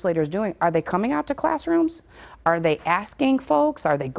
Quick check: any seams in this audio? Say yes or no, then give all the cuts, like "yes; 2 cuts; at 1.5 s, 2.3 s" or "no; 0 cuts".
no; 0 cuts